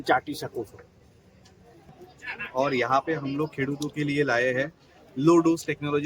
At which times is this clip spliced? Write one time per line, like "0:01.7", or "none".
0:02.0